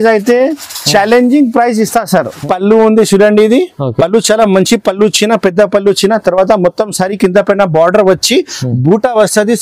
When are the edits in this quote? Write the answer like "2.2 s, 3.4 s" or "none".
2.4 s